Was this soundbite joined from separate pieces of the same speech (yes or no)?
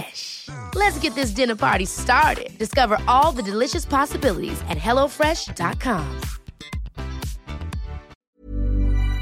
yes